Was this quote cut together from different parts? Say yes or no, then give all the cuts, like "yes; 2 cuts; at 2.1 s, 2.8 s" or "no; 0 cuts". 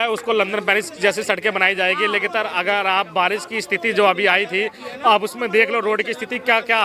no; 0 cuts